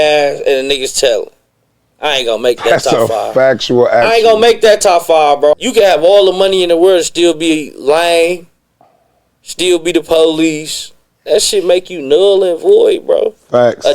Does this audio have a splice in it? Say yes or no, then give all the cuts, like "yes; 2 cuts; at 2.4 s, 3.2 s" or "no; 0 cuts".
yes; 1 cut; at 5.5 s